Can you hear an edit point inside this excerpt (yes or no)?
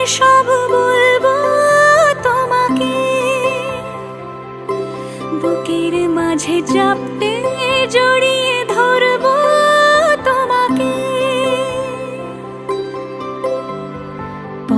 no